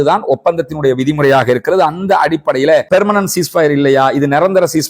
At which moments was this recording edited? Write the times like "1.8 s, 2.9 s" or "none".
2.9 s